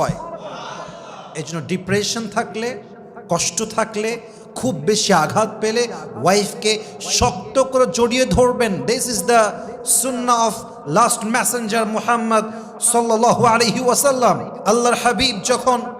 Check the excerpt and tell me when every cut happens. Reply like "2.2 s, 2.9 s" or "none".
none